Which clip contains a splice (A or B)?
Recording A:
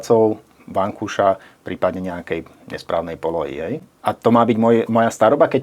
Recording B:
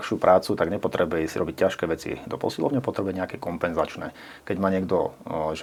A